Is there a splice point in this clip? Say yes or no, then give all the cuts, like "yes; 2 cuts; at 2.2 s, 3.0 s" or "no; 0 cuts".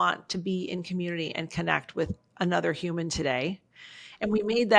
no; 0 cuts